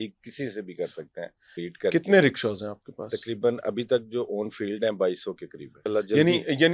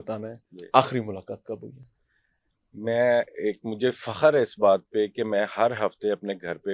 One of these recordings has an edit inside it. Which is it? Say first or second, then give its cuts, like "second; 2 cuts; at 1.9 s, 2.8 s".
first; 2 cuts; at 1.5 s, 5.8 s